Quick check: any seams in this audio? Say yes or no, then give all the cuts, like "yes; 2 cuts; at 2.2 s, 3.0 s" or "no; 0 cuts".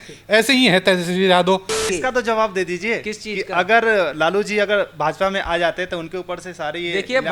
yes; 1 cut; at 1.9 s